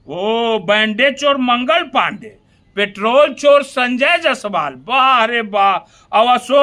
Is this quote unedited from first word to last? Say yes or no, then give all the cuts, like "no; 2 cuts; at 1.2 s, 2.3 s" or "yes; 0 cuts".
yes; 0 cuts